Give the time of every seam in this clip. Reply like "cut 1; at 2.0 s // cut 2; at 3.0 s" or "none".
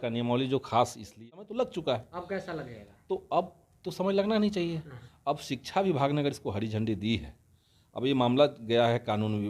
cut 1; at 1.2 s

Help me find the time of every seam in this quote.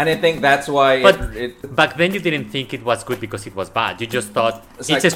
cut 1; at 1.6 s

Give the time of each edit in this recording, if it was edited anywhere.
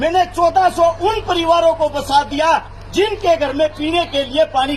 none

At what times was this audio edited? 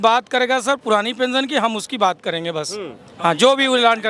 none

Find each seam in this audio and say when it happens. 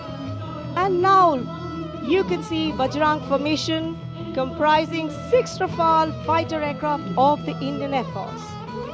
none

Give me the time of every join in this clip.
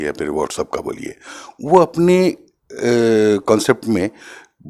none

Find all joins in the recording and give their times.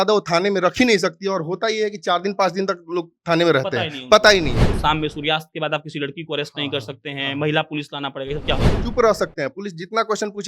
cut 1; at 4.6 s // cut 2; at 8.8 s

